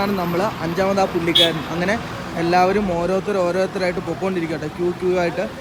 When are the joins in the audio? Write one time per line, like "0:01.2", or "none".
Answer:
none